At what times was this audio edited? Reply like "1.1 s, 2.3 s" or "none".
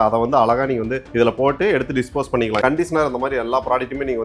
2.6 s